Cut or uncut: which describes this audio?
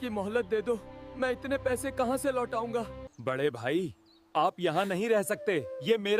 cut